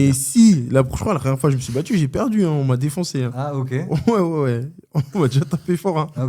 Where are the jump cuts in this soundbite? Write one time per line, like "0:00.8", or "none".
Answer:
none